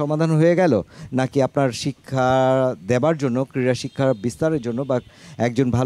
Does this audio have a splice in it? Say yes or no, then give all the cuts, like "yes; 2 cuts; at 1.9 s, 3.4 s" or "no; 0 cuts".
no; 0 cuts